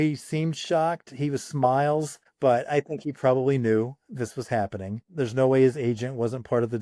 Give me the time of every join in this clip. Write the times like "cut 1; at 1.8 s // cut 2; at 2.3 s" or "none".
cut 1; at 2.2 s // cut 2; at 5.0 s